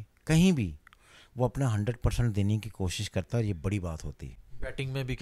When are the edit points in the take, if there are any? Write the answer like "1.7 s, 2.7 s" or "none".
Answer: none